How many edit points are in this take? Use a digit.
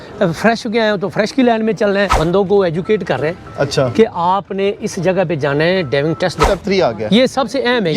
2